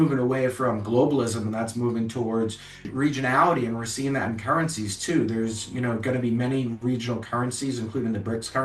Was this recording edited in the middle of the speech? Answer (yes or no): yes